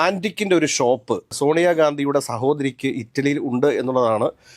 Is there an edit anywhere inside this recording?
yes; 1 cut; at 1.3 s

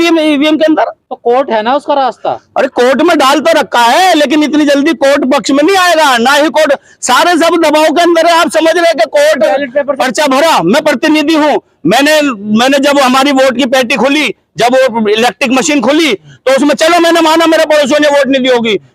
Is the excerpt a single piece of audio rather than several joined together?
no; 2 cuts; at 1.0 s, 10.0 s

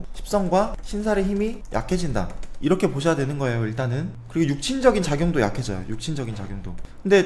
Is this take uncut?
yes; 0 cuts

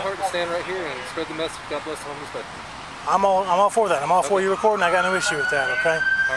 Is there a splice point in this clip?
no; 0 cuts

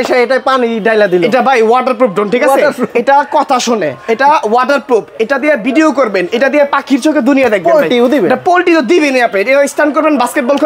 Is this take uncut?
yes; 0 cuts

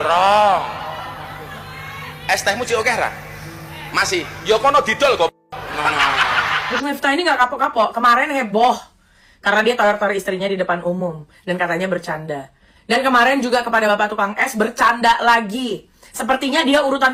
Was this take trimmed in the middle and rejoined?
no; 0 cuts

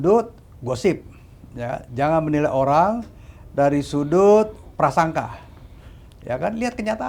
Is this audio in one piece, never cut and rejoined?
yes; 0 cuts

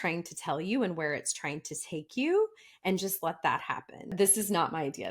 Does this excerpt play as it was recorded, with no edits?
no; 1 cut; at 4.1 s

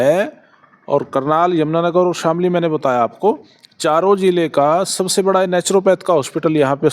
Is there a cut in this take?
no; 0 cuts

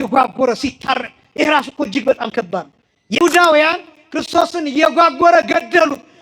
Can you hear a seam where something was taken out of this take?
yes; 1 cut; at 3.2 s

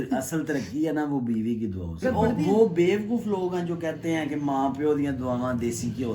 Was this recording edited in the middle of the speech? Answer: yes; 1 cut; at 2.0 s

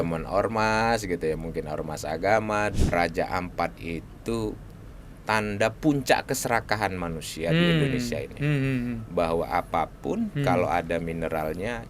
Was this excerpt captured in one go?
no; 1 cut; at 2.7 s

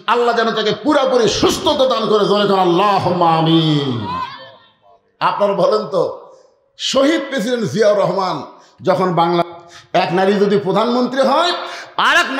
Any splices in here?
yes; 1 cut; at 9.5 s

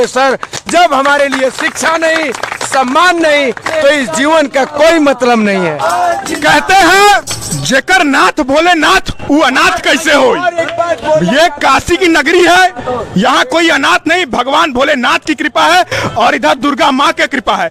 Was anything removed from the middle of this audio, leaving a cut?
no; 0 cuts

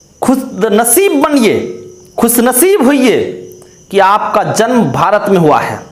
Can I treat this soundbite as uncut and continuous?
yes; 0 cuts

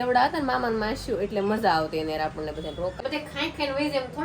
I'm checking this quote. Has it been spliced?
yes; 1 cut; at 3.0 s

